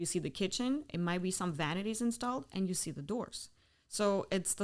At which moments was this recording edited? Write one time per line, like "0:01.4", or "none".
none